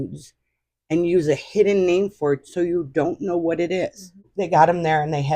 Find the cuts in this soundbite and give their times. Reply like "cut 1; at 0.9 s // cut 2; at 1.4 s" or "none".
cut 1; at 4.1 s